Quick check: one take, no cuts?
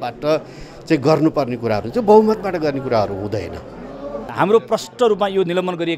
no; 1 cut; at 4.3 s

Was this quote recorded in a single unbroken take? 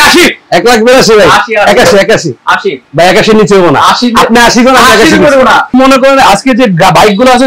no; 1 cut; at 5.7 s

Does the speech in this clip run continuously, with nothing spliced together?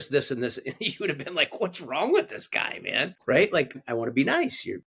no; 2 cuts; at 3.1 s, 3.8 s

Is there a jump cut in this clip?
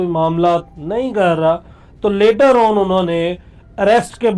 no; 0 cuts

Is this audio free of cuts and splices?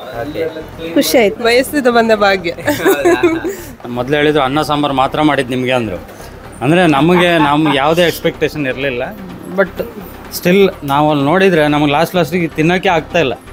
no; 2 cuts; at 1.4 s, 3.9 s

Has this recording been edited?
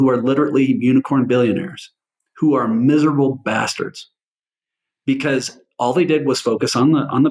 no; 0 cuts

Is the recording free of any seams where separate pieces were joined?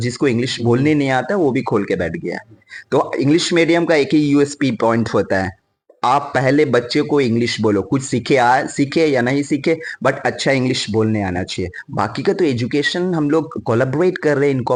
yes; 0 cuts

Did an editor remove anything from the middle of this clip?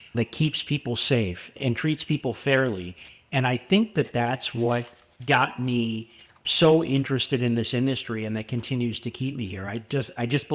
no; 0 cuts

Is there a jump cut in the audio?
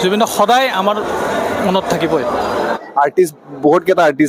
yes; 1 cut; at 2.8 s

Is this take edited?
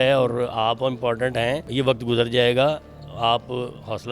yes; 1 cut; at 1.7 s

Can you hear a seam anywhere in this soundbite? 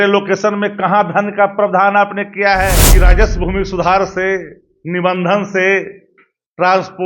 yes; 1 cut; at 2.9 s

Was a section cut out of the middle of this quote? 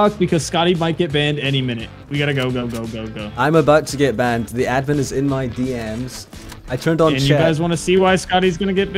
no; 0 cuts

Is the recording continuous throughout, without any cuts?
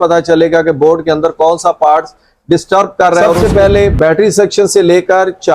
no; 1 cut; at 3.3 s

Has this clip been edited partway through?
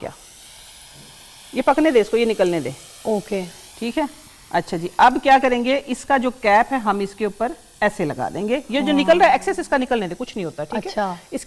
no; 0 cuts

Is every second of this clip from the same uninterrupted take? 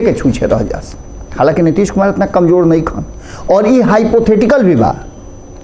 yes; 0 cuts

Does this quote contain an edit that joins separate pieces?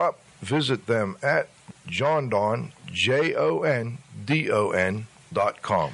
yes; 1 cut; at 1.7 s

